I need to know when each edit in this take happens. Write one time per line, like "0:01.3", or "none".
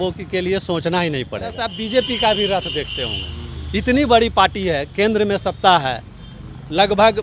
0:01.7